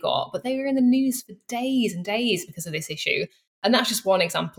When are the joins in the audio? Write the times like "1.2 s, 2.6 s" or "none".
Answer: 3.6 s